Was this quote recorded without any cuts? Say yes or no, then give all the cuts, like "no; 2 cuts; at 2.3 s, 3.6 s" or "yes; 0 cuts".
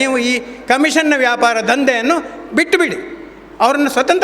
yes; 0 cuts